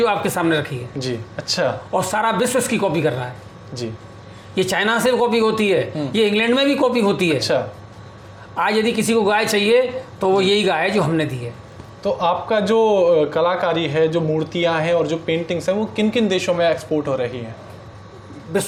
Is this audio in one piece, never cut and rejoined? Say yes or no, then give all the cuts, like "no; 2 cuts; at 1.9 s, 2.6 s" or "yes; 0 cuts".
yes; 0 cuts